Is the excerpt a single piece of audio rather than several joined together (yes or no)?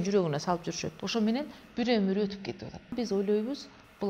no